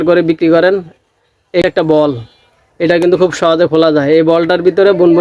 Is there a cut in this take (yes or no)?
yes